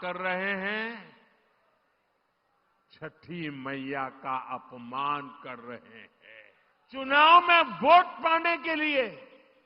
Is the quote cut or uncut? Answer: cut